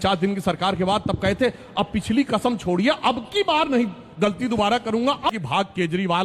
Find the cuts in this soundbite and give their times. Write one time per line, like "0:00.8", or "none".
0:05.3